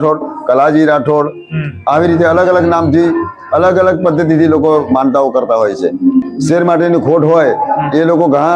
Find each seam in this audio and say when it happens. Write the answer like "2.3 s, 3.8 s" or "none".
6.3 s